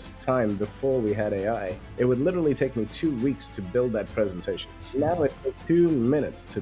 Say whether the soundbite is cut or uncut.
cut